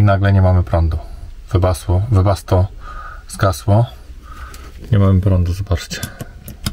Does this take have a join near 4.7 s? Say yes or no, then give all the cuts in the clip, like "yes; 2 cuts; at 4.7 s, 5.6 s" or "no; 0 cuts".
no; 0 cuts